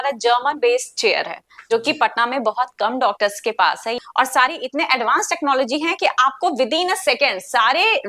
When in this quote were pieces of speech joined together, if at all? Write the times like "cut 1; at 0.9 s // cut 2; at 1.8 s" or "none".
cut 1; at 4.0 s